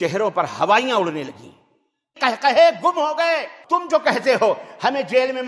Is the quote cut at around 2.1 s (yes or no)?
yes